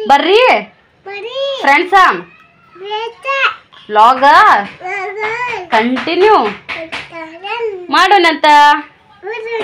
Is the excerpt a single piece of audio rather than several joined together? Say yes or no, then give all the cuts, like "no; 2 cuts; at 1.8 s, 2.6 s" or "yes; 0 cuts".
yes; 0 cuts